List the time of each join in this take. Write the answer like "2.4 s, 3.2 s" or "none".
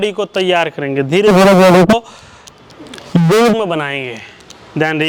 none